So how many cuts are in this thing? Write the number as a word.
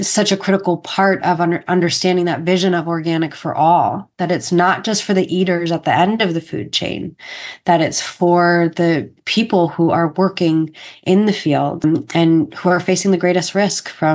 two